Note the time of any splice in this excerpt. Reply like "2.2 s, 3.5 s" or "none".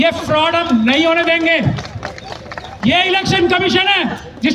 none